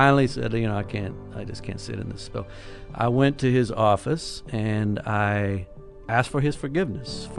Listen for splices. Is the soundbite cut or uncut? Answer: cut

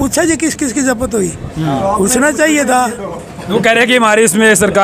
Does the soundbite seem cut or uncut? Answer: uncut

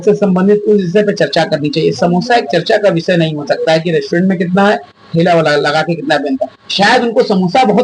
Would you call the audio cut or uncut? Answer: uncut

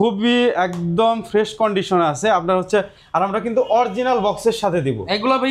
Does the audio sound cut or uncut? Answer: uncut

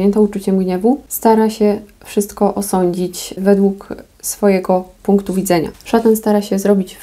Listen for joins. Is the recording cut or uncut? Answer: cut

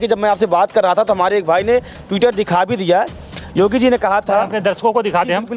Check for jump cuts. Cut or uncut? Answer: uncut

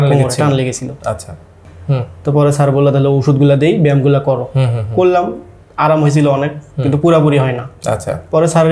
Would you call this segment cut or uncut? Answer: cut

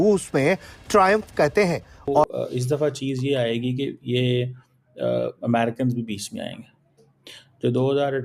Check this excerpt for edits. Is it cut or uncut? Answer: cut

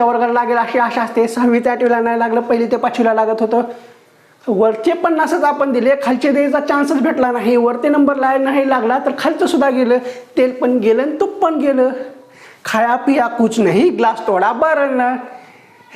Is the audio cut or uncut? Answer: uncut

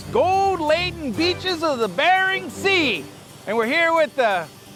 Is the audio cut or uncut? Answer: uncut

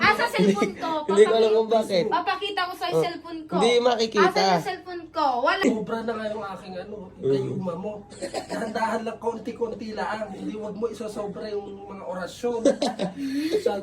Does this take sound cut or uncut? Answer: cut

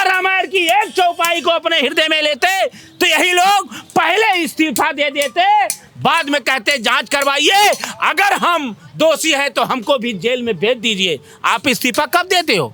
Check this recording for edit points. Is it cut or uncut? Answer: uncut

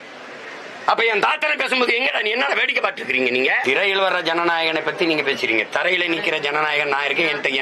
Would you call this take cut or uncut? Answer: cut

